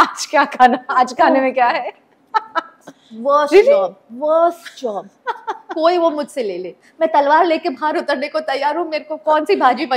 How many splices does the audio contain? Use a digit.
0